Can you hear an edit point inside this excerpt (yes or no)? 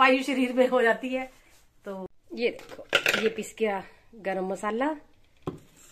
no